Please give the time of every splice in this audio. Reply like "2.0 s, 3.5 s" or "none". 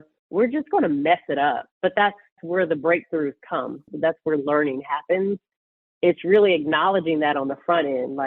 3.9 s, 5.5 s